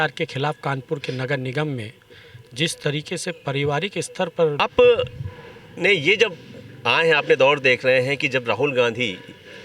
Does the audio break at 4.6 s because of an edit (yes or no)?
yes